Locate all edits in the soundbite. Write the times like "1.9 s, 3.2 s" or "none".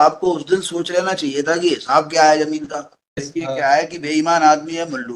3.3 s